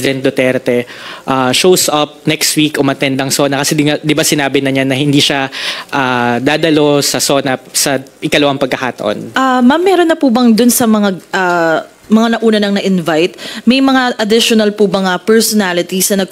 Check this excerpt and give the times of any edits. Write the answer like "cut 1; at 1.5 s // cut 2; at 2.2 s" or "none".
cut 1; at 9.3 s